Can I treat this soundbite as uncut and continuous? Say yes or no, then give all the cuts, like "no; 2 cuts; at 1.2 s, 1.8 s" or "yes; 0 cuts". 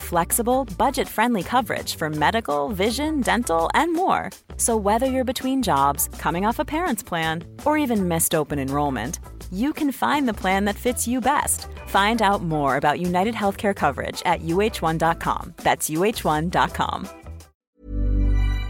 no; 1 cut; at 17.7 s